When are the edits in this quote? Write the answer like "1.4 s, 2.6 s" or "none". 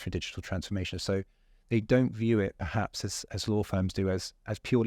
none